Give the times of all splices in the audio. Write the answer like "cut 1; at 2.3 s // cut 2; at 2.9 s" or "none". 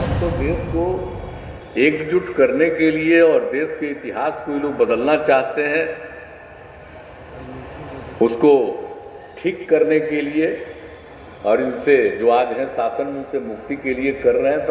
none

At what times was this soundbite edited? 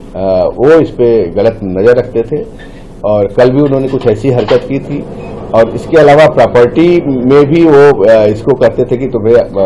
none

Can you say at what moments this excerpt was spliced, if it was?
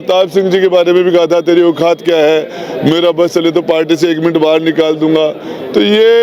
none

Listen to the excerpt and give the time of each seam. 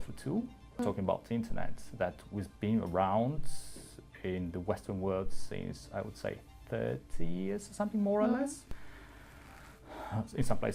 cut 1; at 0.8 s // cut 2; at 8.7 s

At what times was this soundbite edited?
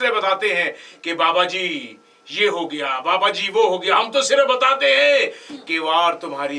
none

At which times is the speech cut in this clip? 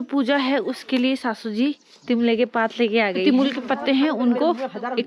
cut 1; at 3.2 s

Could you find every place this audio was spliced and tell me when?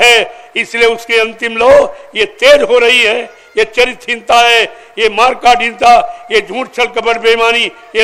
none

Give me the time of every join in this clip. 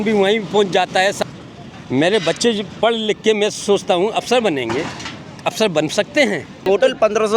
cut 1; at 1.2 s // cut 2; at 6.7 s

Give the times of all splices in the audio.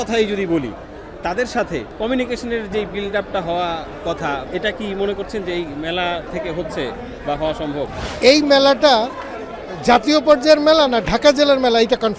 cut 1; at 1.9 s // cut 2; at 4.5 s // cut 3; at 6.3 s // cut 4; at 8.0 s

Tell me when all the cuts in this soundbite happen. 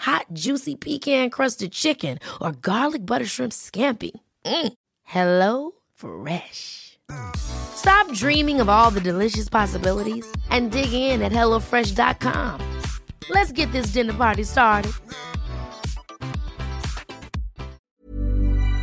cut 1; at 17.8 s

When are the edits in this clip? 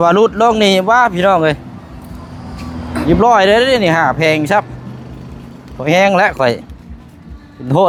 none

